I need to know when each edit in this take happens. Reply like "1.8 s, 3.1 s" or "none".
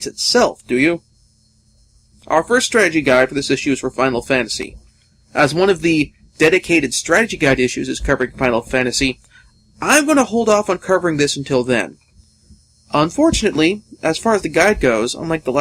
6.6 s